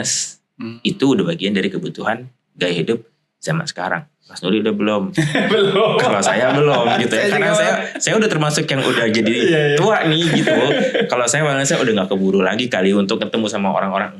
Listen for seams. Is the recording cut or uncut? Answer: uncut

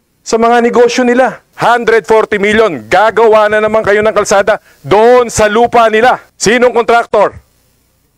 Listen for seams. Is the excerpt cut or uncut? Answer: cut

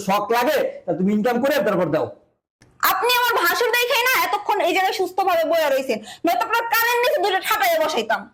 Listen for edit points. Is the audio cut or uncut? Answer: cut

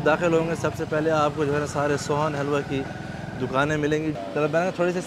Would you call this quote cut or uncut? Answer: cut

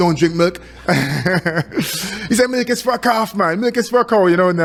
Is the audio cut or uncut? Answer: uncut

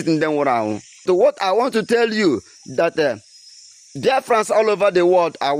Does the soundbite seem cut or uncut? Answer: cut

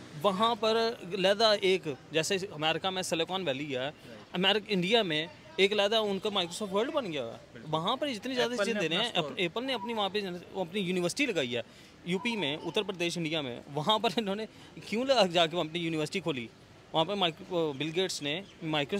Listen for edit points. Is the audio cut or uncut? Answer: uncut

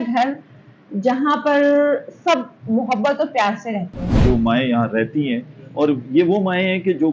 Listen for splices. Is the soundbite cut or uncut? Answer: cut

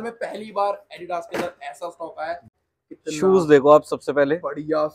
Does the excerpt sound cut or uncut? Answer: cut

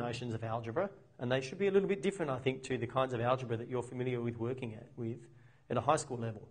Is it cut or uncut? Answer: uncut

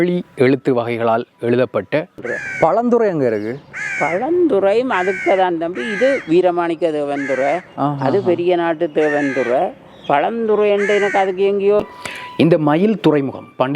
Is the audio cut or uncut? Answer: cut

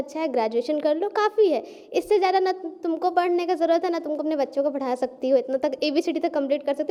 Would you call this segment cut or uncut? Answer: uncut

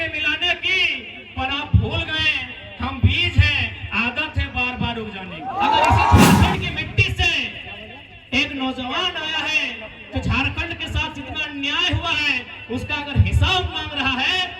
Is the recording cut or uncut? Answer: cut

